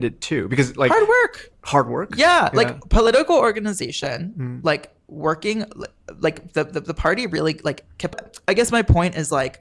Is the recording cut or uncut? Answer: cut